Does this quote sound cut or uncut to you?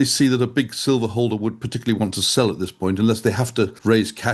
uncut